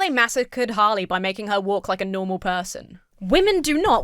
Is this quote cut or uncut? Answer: cut